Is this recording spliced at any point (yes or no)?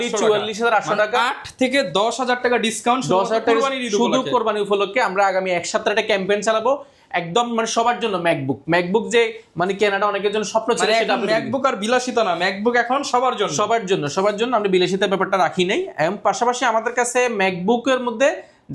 no